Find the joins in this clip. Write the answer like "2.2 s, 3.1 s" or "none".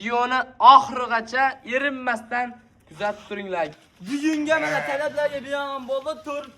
3.9 s

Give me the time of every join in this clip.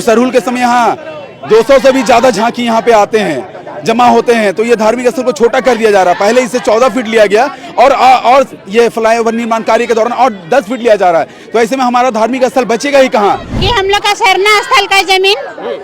13.5 s

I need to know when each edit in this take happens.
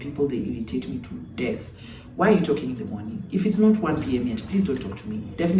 none

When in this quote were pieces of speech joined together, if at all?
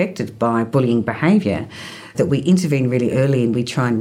none

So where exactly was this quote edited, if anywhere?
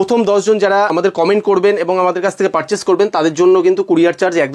0.9 s

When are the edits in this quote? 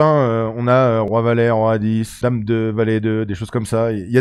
1.1 s, 2.1 s

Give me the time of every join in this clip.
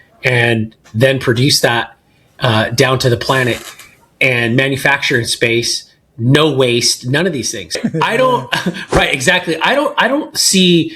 7.7 s

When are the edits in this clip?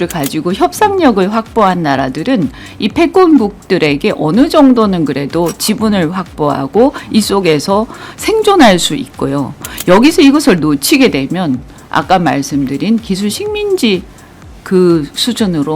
none

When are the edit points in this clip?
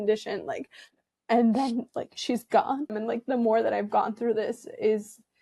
3.0 s

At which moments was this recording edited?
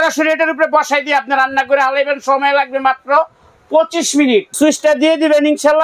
4.5 s

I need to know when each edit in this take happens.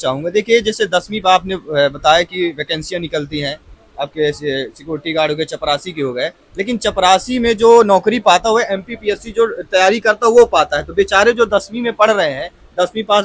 none

